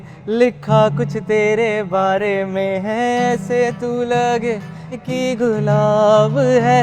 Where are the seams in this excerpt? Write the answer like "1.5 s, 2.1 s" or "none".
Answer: 5.1 s